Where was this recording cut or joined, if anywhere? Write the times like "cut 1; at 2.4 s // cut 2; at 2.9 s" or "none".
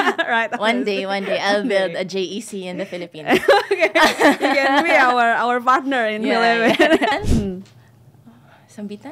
cut 1; at 7.1 s